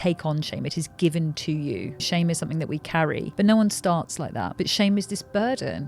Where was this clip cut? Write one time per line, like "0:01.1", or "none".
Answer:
0:02.0
0:03.3
0:04.5